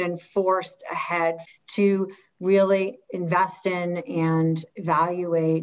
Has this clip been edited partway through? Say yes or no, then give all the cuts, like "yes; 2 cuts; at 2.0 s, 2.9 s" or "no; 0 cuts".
yes; 1 cut; at 1.4 s